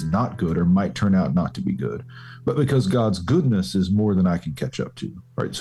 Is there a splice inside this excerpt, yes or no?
no